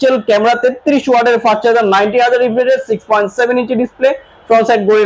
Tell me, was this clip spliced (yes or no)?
no